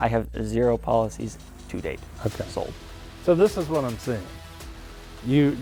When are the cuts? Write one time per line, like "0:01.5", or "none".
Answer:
none